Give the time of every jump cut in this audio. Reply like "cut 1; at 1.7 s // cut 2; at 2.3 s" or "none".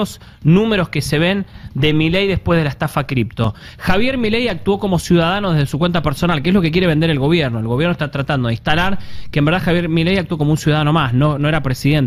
none